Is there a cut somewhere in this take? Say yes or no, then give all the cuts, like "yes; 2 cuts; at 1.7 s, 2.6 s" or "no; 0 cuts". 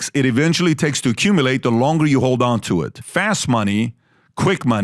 yes; 1 cut; at 3.0 s